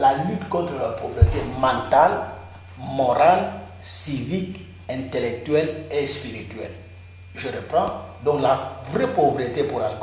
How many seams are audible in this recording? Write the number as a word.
zero